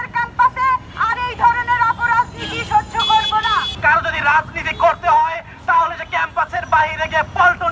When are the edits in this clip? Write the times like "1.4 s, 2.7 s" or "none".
3.7 s